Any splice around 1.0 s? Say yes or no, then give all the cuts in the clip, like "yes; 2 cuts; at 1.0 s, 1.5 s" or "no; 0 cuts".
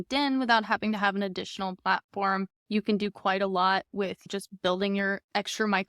no; 2 cuts; at 2.6 s, 4.3 s